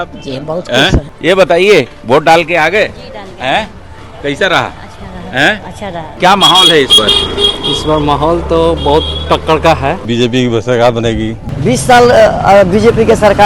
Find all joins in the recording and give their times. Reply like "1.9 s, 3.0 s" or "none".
1.1 s, 6.1 s, 10.1 s, 11.3 s